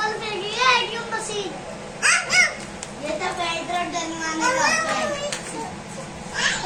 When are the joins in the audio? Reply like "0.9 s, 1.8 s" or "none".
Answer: none